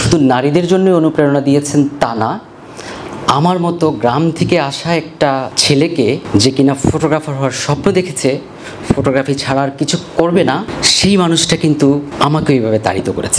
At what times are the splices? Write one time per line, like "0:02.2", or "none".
0:05.5
0:06.2
0:10.8
0:12.1